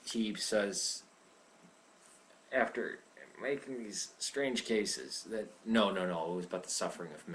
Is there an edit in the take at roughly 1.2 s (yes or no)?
yes